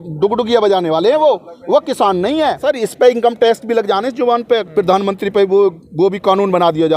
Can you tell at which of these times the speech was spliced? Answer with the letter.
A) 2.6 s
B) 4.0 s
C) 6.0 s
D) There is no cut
A